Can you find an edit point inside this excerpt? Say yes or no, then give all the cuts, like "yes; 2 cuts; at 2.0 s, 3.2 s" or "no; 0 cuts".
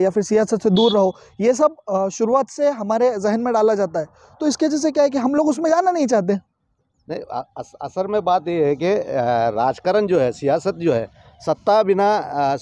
no; 0 cuts